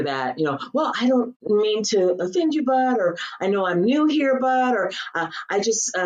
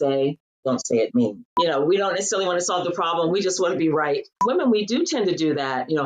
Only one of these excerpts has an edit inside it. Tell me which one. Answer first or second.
second